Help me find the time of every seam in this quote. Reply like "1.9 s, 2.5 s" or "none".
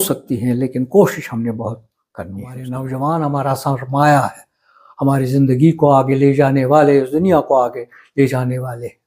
2.7 s